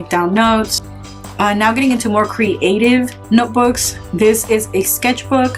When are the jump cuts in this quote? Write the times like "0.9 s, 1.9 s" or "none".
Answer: 1.0 s